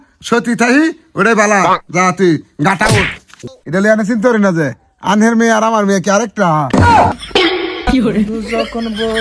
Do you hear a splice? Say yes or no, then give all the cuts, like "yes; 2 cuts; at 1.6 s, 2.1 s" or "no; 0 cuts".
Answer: yes; 2 cuts; at 3.2 s, 7.2 s